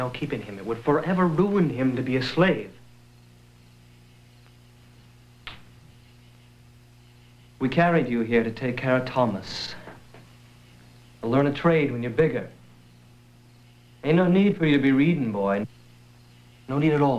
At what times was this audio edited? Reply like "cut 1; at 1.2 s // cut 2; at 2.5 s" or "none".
none